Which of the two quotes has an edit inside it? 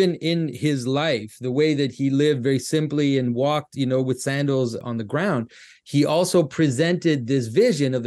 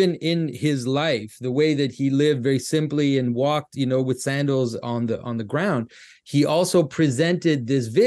first; 1 cut; at 4.8 s

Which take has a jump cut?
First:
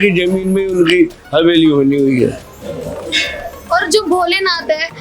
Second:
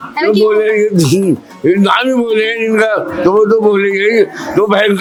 first; 1 cut; at 2.5 s

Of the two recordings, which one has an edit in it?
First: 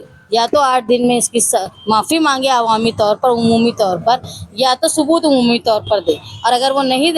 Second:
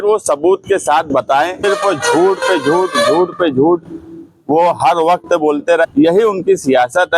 second; 2 cuts; at 1.6 s, 5.8 s

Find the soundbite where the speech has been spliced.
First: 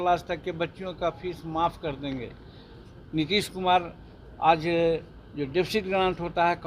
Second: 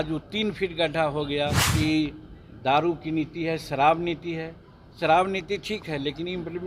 second; 1 cut; at 1.6 s

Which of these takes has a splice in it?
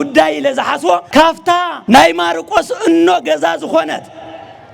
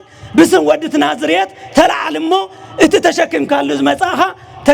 first; 1 cut; at 1.2 s

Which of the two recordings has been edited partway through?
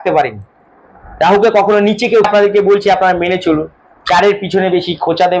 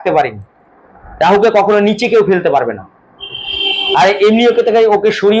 first; 1 cut; at 2.3 s

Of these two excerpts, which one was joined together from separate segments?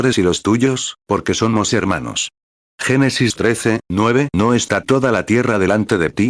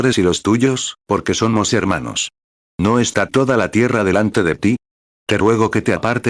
second; 1 cut; at 2.8 s

